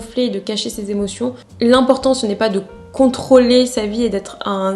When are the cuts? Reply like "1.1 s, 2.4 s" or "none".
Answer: 1.5 s

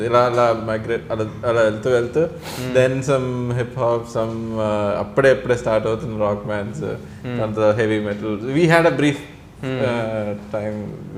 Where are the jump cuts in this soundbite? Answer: none

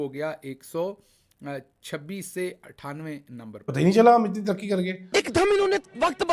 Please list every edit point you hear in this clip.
3.6 s

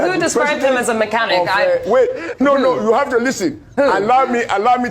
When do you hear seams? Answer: 1.2 s

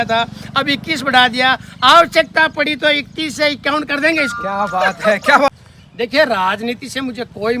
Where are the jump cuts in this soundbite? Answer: 5.5 s

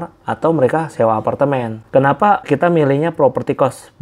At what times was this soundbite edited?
1.8 s

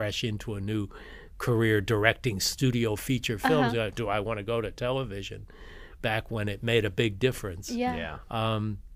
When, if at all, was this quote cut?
none

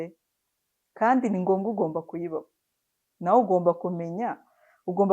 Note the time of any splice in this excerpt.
none

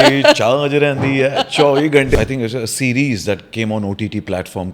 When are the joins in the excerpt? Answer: 2.1 s

